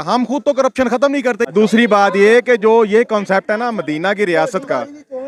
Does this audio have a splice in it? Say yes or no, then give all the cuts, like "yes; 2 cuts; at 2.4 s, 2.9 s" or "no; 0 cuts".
no; 0 cuts